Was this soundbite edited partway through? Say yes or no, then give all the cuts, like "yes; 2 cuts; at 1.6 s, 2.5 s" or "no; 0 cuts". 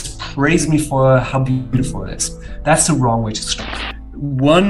yes; 1 cut; at 3.4 s